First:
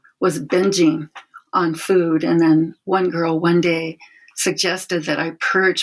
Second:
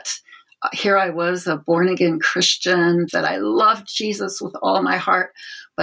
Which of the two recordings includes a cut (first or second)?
second